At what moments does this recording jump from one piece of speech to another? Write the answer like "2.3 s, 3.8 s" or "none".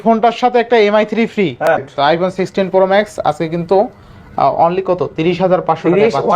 1.7 s